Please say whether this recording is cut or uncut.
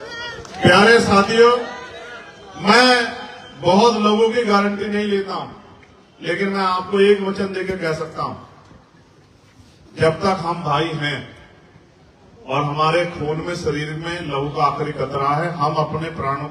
uncut